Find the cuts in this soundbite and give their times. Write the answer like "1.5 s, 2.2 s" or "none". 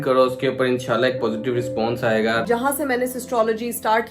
2.4 s